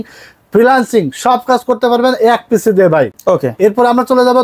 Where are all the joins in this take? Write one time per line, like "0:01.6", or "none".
none